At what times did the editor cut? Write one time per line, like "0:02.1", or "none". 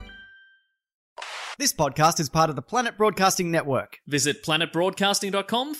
0:01.1